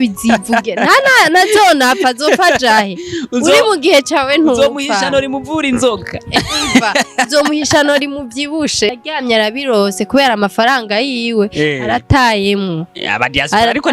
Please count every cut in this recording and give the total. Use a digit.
1